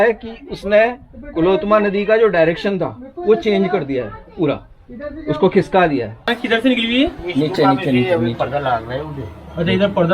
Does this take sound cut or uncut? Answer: cut